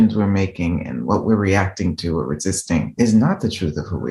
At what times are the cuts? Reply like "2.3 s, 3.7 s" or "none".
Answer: 2.9 s